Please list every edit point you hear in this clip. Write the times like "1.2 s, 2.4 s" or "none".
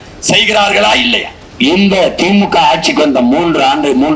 1.5 s